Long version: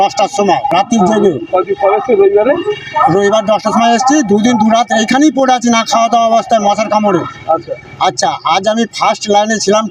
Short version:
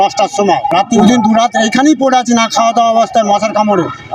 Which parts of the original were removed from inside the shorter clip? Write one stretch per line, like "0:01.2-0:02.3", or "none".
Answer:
0:01.0-0:04.3